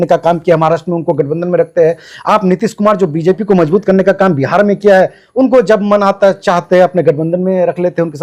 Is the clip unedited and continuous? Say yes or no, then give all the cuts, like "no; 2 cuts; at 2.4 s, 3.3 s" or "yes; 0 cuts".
yes; 0 cuts